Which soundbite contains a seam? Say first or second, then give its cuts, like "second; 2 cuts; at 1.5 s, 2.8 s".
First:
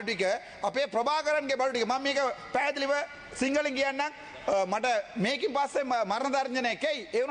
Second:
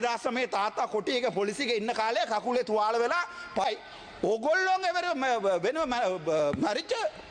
second; 1 cut; at 3.6 s